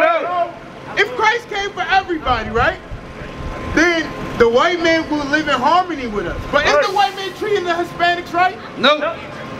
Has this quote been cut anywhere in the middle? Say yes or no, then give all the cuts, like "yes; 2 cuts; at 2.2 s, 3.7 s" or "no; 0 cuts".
no; 0 cuts